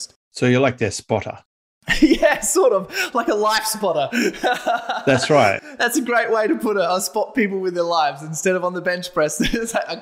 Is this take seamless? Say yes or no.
yes